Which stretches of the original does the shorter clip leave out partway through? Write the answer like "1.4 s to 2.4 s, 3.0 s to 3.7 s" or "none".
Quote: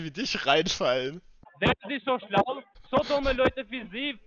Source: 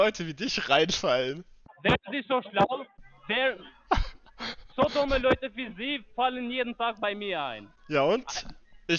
3.0 s to 4.6 s